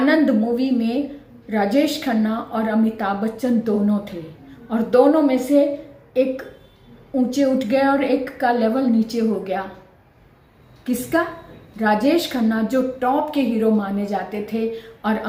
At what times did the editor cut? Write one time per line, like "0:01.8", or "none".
none